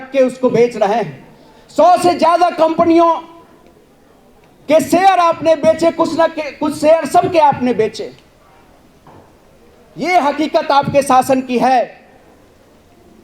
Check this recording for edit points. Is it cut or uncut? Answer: uncut